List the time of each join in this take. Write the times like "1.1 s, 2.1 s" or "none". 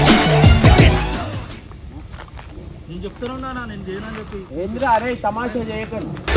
1.6 s

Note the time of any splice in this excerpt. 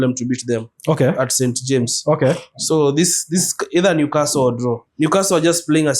4.8 s

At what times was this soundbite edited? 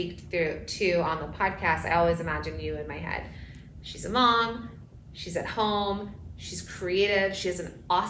none

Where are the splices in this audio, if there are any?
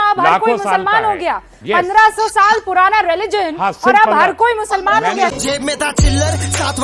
none

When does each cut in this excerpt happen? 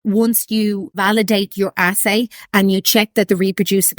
1.0 s

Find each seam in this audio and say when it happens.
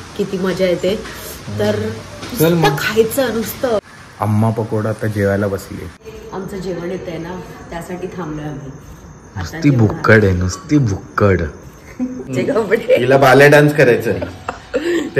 3.8 s, 6.0 s, 12.3 s

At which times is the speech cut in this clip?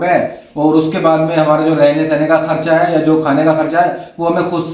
none

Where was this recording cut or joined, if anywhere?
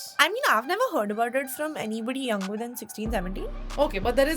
none

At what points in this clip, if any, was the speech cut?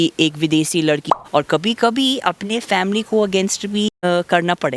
1.0 s, 3.9 s

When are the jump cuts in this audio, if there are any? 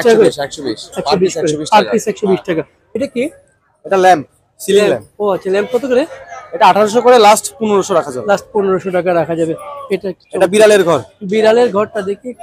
2.8 s

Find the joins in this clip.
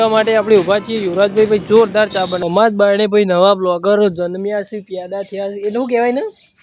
2.4 s

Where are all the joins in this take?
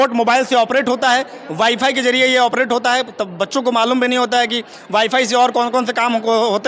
none

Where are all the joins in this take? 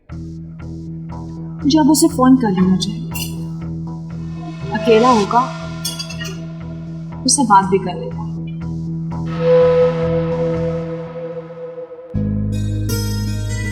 none

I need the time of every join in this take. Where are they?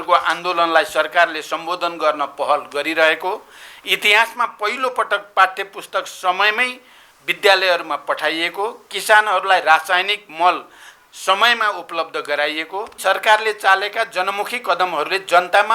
12.9 s

